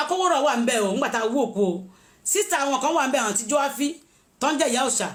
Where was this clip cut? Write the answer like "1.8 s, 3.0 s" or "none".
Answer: none